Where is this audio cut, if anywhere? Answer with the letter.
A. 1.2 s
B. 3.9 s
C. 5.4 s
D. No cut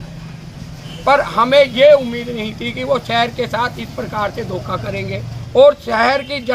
C